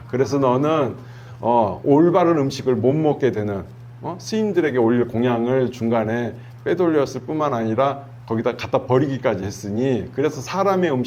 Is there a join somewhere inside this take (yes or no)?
no